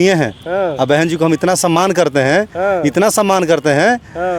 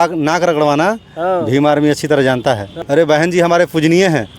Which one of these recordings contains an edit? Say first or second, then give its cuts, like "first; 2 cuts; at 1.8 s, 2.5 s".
second; 1 cut; at 2.7 s